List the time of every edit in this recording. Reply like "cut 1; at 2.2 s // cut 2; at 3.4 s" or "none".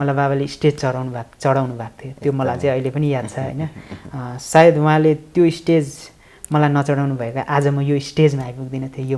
none